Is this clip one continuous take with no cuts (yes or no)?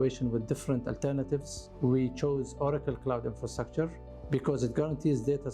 yes